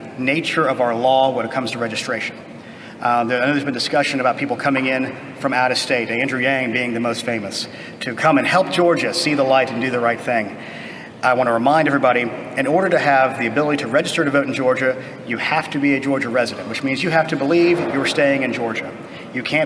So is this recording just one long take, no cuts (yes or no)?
yes